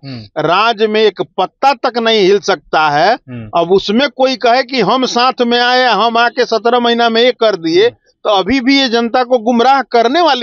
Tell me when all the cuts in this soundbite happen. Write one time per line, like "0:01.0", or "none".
none